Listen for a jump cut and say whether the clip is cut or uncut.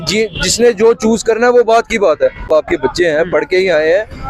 cut